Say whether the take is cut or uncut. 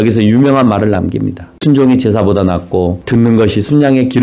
cut